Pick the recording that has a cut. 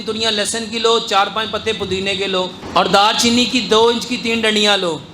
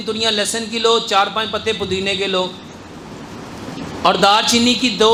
first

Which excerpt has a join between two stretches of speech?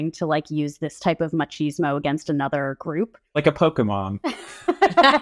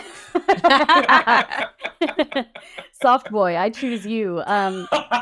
first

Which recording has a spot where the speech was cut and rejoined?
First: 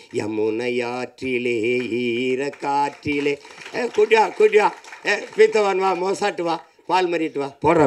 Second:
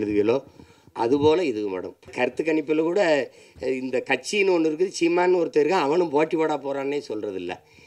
second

